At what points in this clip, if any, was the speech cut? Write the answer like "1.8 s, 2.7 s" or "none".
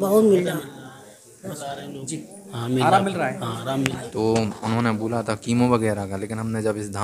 4.0 s